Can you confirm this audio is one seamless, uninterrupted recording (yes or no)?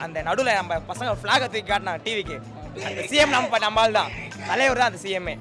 yes